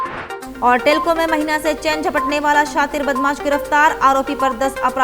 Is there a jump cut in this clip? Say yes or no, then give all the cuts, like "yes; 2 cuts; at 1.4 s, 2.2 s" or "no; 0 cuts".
no; 0 cuts